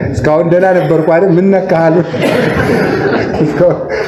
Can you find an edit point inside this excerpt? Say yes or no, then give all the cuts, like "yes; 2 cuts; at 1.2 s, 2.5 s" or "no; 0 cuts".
no; 0 cuts